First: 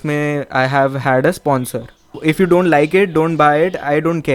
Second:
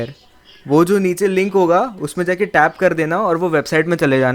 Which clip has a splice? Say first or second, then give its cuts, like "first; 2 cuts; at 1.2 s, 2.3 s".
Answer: first; 1 cut; at 2.1 s